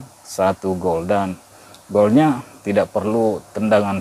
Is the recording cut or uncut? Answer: uncut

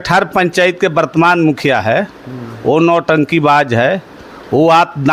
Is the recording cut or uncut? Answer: uncut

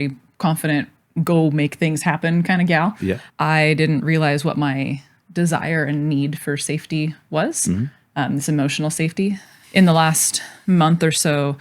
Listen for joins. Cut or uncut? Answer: cut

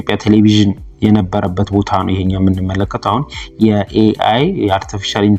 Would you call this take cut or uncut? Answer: uncut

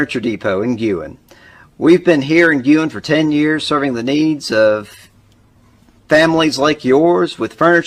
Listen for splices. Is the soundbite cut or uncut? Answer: uncut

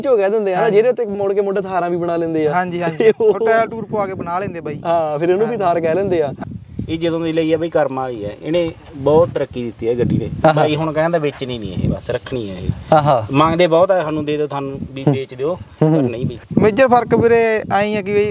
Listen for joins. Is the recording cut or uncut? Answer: cut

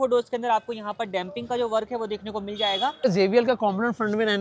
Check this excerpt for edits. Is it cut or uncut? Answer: cut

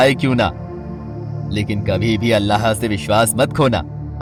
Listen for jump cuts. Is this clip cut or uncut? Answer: uncut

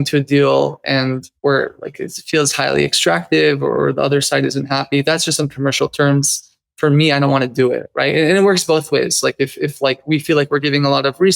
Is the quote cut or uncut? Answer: cut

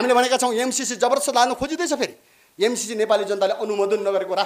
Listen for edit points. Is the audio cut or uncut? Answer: uncut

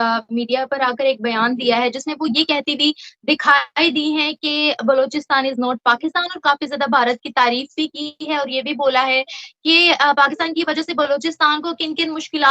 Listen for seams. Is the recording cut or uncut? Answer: uncut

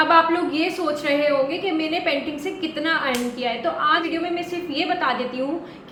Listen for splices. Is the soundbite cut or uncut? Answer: uncut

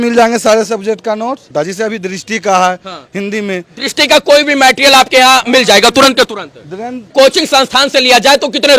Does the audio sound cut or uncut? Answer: cut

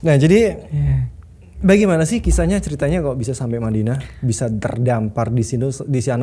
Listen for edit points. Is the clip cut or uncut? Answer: uncut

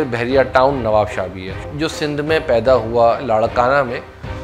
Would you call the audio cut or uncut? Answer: cut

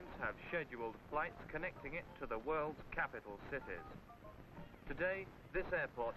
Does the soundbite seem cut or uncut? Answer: cut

